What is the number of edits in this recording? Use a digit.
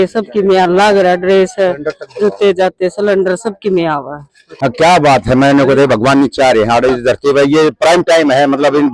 1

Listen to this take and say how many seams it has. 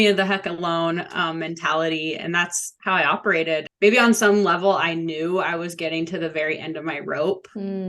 1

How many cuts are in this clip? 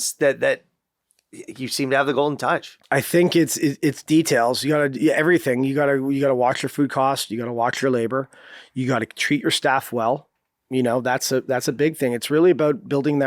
1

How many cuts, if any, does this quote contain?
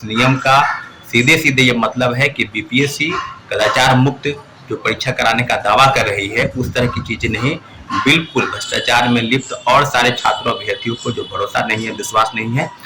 0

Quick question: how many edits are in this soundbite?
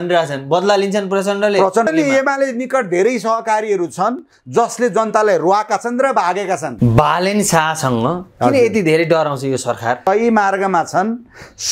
3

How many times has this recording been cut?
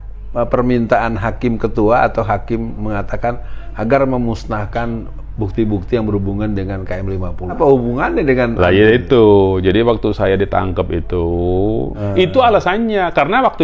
2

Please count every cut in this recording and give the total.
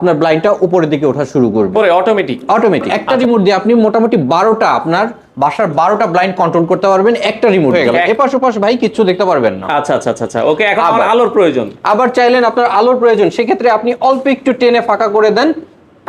2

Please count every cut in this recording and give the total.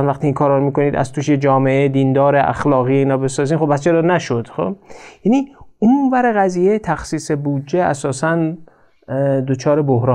0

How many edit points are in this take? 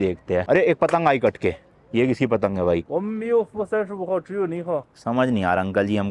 1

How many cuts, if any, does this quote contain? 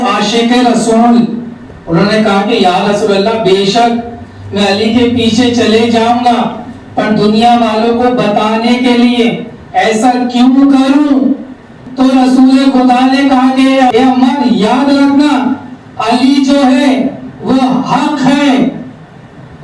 0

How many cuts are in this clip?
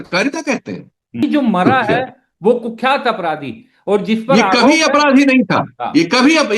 1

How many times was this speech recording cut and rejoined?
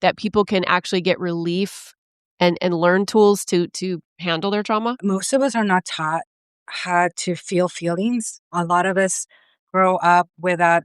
2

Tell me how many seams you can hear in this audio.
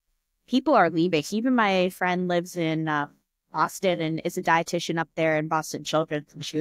1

